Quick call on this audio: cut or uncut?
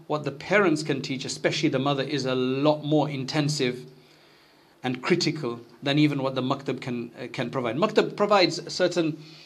uncut